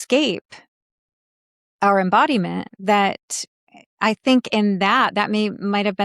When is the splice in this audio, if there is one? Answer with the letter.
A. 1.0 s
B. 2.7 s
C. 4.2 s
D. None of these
B